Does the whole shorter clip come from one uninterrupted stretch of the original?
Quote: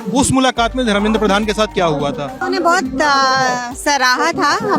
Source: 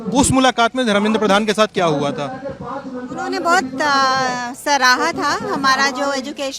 no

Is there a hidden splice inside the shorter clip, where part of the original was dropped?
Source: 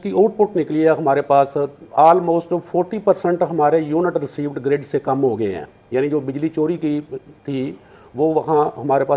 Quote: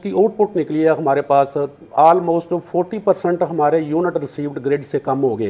no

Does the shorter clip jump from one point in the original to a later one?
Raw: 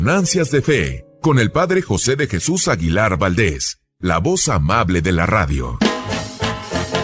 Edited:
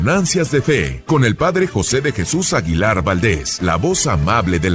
yes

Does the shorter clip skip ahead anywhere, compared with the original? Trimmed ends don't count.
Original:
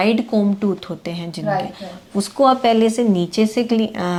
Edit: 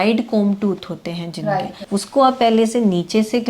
yes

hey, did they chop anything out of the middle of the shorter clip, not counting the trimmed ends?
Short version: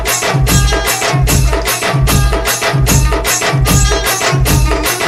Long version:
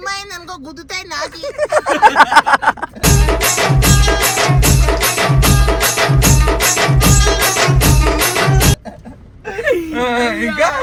no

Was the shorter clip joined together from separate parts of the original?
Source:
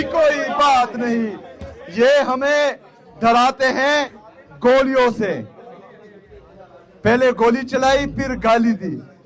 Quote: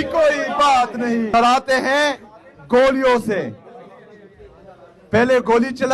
yes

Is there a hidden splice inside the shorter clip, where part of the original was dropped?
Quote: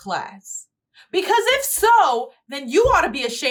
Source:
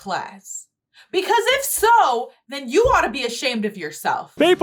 no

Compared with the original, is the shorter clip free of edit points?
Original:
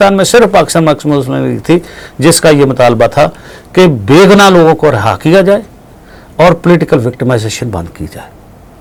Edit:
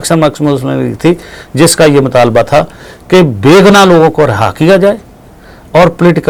yes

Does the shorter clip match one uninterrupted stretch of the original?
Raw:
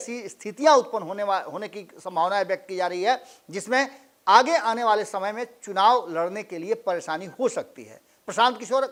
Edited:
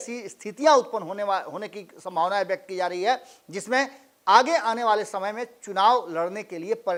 yes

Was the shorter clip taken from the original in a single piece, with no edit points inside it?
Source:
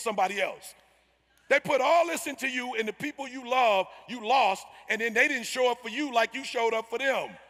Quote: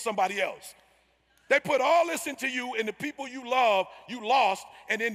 yes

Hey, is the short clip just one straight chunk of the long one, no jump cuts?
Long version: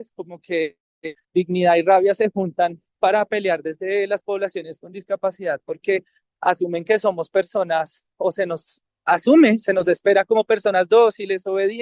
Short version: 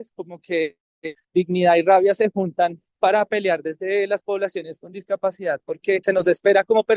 no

